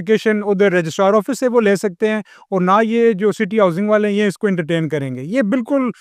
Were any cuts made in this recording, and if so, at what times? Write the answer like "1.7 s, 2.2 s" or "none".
none